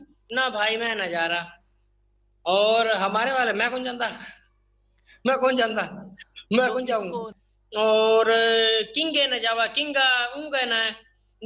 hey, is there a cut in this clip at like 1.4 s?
no; 1 cut; at 7.3 s

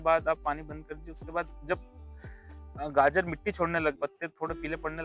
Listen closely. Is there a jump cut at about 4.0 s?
yes; 1 cut; at 4.0 s

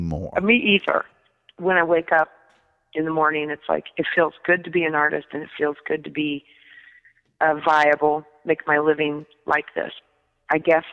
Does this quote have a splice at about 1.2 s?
yes; 2 cuts; at 1.2 s, 10.0 s

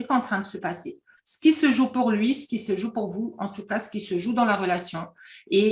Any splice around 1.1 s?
yes; 1 cut; at 1.1 s

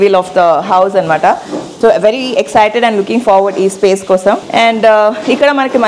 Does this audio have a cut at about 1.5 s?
no; 0 cuts

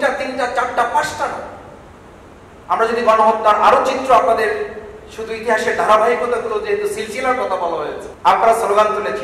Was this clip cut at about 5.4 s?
no; 1 cut; at 8.0 s

